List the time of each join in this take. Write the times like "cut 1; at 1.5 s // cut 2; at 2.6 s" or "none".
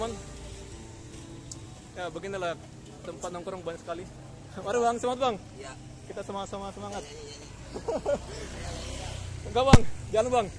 none